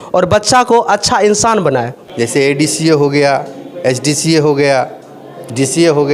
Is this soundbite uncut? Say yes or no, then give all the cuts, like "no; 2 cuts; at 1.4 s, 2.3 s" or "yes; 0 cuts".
no; 1 cut; at 2.0 s